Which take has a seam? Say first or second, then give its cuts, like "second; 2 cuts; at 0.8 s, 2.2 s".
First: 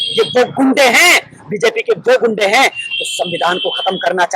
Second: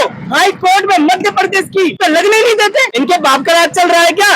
second; 2 cuts; at 2.0 s, 2.9 s